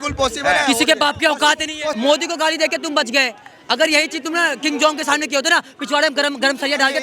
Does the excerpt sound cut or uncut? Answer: cut